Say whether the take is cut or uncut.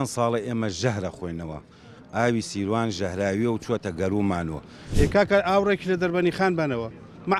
cut